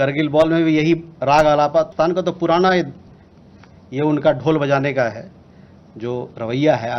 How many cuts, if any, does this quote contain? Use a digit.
1